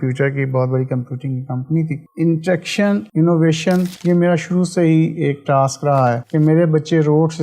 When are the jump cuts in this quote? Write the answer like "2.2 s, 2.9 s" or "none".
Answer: 2.0 s